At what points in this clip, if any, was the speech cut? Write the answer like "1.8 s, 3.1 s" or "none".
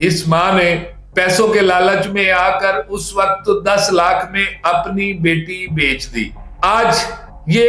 6.5 s